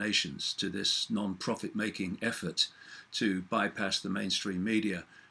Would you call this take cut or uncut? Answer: uncut